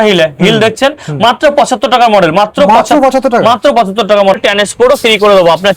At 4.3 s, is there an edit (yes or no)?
yes